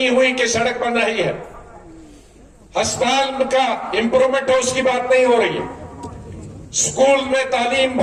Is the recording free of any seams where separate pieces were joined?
yes; 0 cuts

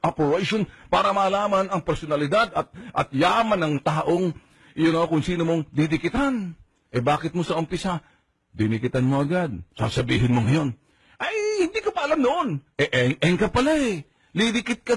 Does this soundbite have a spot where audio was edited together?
yes; 1 cut; at 2.1 s

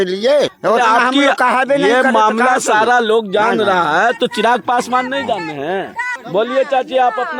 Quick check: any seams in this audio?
no; 0 cuts

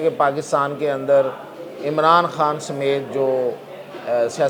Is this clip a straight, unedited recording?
yes; 0 cuts

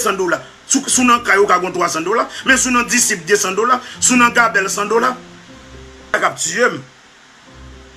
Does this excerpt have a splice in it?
yes; 1 cut; at 6.1 s

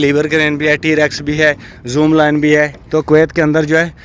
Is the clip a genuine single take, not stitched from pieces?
no; 1 cut; at 2.8 s

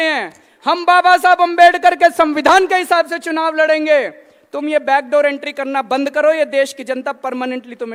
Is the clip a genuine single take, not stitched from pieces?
yes; 0 cuts

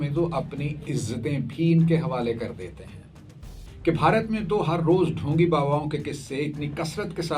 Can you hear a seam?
yes; 1 cut; at 3.6 s

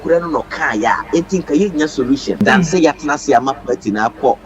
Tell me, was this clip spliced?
yes; 1 cut; at 2.4 s

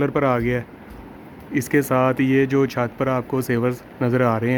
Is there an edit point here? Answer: no; 0 cuts

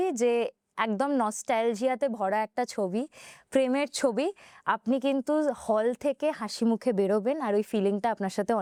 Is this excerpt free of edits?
yes; 0 cuts

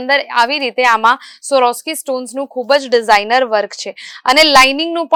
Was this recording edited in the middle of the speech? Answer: no; 0 cuts

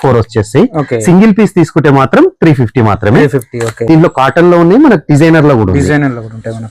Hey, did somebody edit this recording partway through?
yes; 1 cut; at 3.7 s

